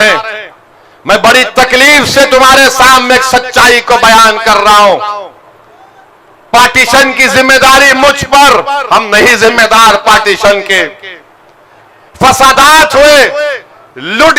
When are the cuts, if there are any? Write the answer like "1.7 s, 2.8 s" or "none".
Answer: none